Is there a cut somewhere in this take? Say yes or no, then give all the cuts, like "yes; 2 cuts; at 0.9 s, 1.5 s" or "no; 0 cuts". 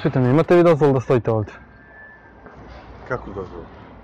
no; 0 cuts